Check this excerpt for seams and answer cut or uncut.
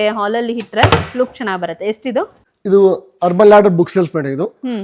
cut